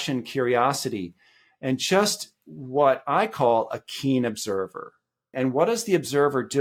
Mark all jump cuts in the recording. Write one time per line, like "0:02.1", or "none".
0:05.3